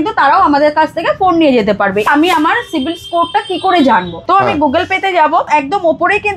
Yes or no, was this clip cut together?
yes